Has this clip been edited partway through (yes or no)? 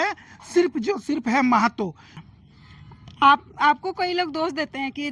yes